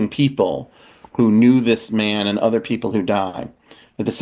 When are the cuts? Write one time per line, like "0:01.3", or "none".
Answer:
none